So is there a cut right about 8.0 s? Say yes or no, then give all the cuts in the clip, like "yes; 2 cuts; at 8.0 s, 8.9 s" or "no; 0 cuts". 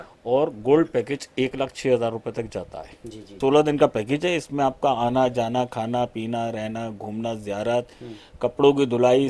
no; 1 cut; at 3.3 s